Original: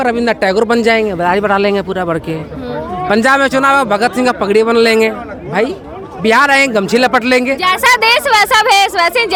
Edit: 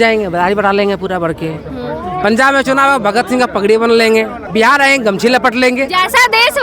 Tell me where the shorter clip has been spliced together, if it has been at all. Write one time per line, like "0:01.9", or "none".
0:04.4